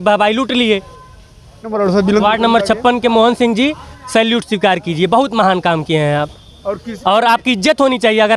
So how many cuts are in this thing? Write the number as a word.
one